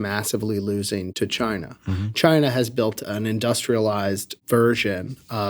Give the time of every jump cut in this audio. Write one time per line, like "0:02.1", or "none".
0:01.1
0:03.0
0:04.3